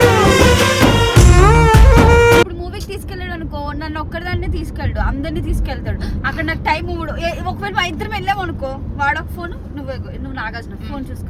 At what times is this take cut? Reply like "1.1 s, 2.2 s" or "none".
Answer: 2.5 s

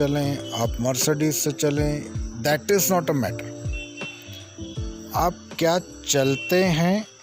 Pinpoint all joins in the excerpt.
3.3 s, 5.1 s

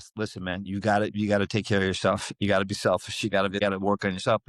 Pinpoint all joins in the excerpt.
3.6 s

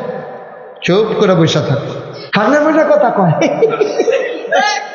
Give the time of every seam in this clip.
2.2 s

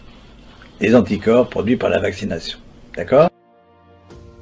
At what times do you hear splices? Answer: 3.5 s

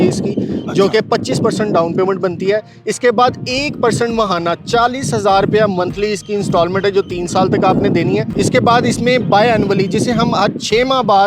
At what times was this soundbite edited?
none

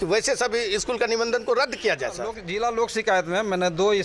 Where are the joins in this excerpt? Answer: 2.4 s

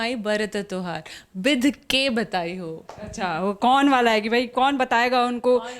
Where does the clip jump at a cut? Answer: none

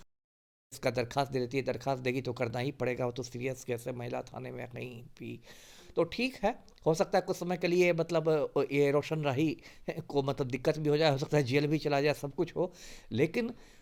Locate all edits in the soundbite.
none

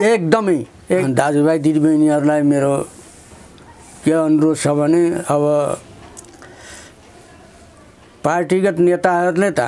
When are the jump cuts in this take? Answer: 1.0 s

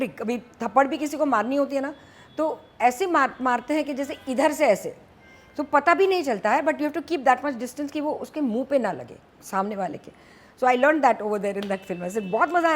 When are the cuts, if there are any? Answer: none

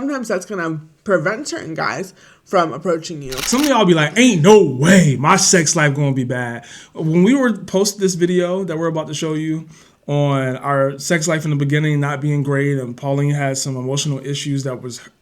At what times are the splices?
3.4 s

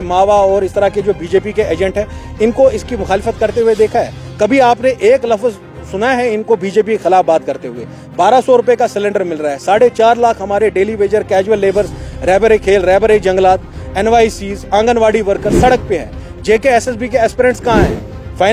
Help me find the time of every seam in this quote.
none

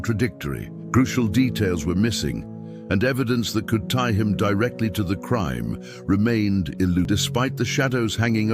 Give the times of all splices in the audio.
7.1 s

